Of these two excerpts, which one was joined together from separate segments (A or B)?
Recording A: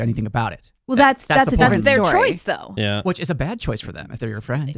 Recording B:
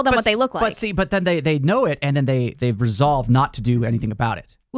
B